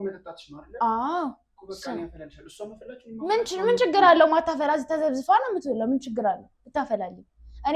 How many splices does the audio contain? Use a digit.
0